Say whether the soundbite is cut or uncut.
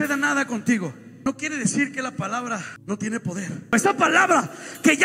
cut